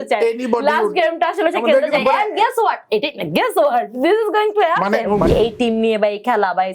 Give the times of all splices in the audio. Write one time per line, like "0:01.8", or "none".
0:05.3